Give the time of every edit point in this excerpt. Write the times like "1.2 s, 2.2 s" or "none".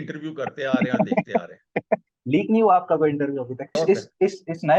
3.8 s